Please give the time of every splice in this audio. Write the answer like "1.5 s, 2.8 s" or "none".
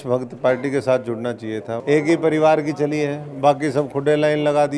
1.7 s